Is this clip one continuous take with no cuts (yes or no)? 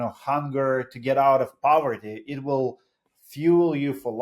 yes